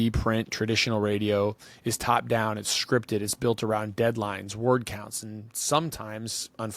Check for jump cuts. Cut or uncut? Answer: uncut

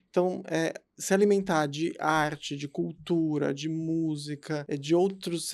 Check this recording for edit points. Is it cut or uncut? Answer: cut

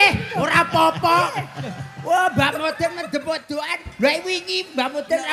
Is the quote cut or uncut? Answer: uncut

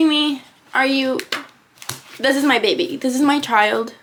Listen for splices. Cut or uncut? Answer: uncut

